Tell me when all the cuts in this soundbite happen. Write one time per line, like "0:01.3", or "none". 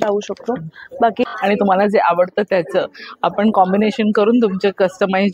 0:01.2